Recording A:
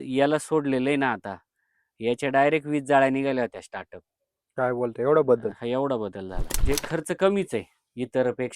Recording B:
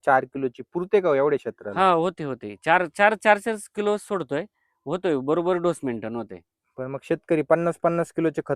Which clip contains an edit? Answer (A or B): A